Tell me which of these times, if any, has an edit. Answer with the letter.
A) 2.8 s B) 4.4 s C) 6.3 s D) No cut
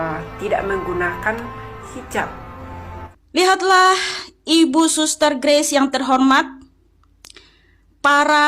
A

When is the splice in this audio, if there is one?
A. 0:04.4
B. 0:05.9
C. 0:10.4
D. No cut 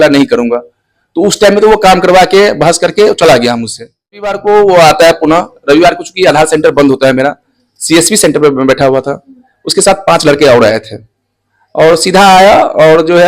A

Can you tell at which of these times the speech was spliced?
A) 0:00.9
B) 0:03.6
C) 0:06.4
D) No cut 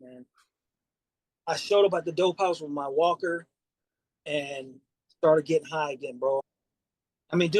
C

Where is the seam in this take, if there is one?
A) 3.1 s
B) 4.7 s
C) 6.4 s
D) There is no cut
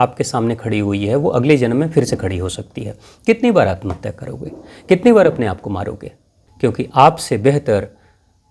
C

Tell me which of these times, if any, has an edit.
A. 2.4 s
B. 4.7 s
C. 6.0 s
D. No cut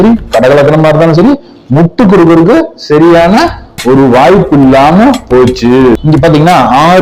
C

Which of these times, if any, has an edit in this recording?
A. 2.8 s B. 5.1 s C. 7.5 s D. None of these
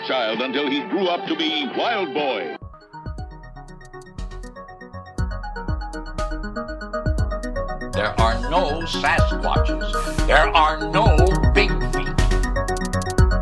A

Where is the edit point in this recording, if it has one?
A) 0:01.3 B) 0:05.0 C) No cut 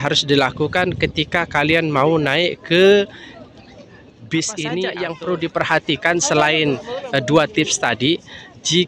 B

